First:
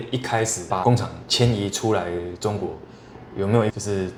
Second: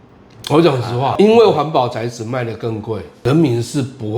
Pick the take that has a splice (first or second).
second